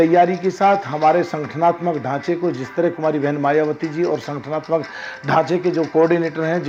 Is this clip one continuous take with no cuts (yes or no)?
yes